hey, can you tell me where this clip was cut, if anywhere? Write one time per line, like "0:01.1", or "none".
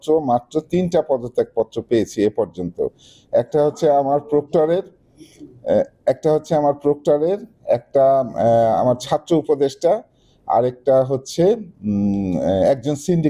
none